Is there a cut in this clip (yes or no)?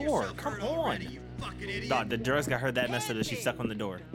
no